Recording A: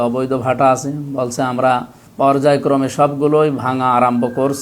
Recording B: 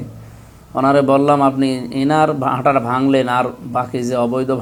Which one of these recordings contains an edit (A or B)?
A